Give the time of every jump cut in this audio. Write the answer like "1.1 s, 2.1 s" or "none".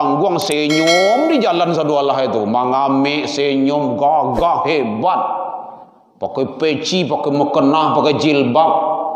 none